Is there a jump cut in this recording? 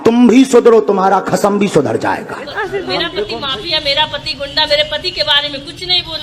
yes; 1 cut; at 3.4 s

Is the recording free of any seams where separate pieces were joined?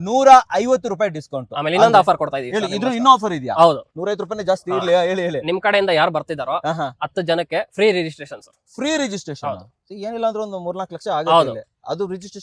yes; 0 cuts

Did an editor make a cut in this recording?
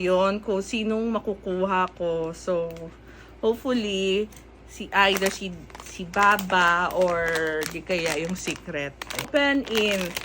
yes; 1 cut; at 9.3 s

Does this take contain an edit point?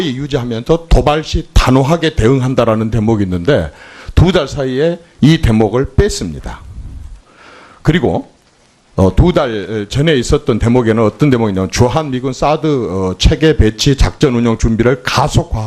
no; 0 cuts

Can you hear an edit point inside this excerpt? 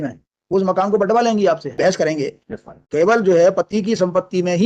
yes; 1 cut; at 1.8 s

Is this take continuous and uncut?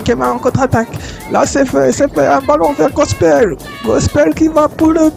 yes; 0 cuts

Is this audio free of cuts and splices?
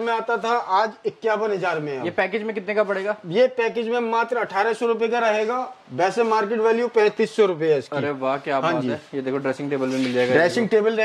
yes; 0 cuts

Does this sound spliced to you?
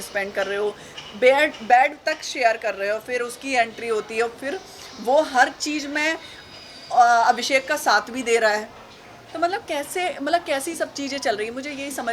no; 0 cuts

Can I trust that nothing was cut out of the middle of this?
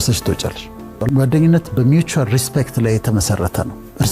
no; 1 cut; at 0.9 s

